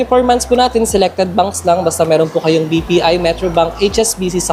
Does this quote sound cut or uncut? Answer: uncut